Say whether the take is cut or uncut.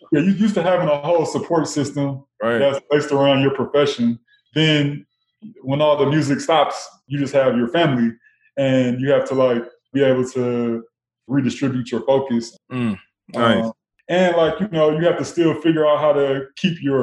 cut